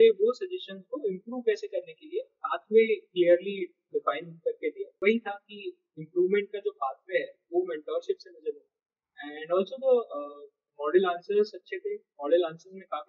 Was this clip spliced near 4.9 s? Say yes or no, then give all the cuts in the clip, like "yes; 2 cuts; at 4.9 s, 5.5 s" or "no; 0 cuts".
yes; 1 cut; at 4.9 s